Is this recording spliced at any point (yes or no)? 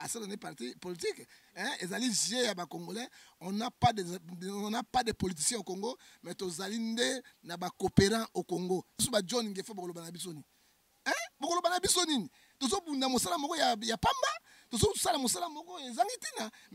yes